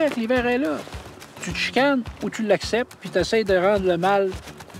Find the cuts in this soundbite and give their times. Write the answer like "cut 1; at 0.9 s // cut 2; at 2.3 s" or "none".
cut 1; at 1.3 s